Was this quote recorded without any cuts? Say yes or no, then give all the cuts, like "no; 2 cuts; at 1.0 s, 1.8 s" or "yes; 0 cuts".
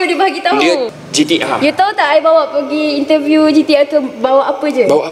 no; 1 cut; at 0.9 s